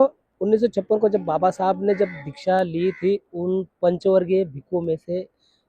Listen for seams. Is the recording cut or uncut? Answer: uncut